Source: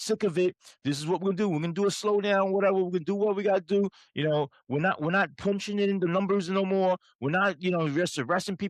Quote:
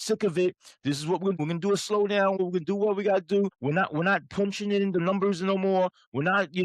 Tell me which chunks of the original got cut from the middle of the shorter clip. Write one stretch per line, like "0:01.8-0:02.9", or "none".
0:01.4-0:01.5
0:02.5-0:02.8
0:04.0-0:04.6